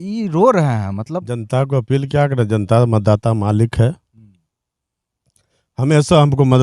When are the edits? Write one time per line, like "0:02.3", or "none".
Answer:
0:01.3